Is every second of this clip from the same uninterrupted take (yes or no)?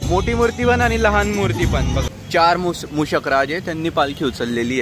no